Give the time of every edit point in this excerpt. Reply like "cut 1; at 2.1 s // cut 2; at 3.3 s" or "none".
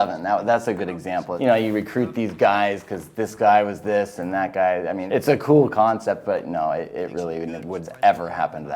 cut 1; at 1.3 s // cut 2; at 5.0 s // cut 3; at 7.9 s